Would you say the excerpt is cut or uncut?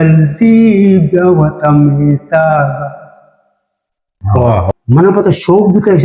cut